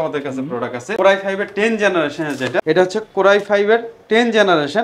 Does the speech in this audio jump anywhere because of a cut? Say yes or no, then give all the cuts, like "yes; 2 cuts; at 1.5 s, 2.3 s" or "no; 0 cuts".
yes; 1 cut; at 2.6 s